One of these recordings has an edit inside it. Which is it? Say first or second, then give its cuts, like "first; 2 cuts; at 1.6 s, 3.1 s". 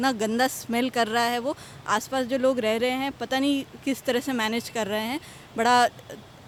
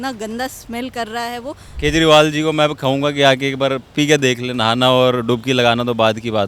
second; 1 cut; at 1.7 s